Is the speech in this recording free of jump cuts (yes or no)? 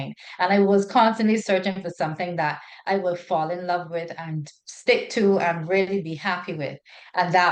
yes